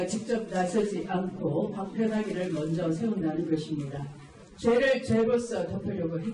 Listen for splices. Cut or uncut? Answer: uncut